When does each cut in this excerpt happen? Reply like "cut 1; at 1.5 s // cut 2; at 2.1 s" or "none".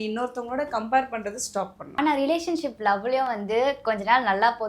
cut 1; at 1.8 s